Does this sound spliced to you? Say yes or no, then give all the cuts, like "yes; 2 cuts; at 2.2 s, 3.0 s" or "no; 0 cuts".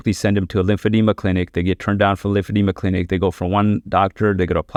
no; 0 cuts